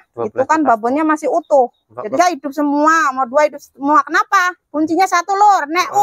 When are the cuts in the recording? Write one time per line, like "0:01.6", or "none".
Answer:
0:02.1